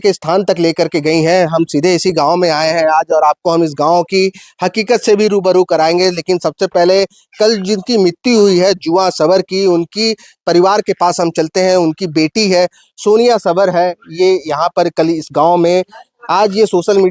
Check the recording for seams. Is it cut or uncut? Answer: uncut